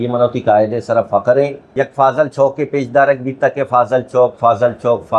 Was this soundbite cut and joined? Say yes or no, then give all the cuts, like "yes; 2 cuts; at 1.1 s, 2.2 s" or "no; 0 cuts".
yes; 1 cut; at 1.7 s